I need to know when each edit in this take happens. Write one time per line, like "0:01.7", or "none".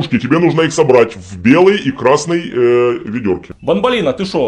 0:03.4